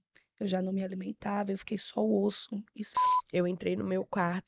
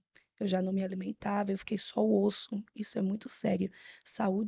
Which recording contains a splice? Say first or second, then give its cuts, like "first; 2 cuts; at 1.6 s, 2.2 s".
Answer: first; 1 cut; at 2.8 s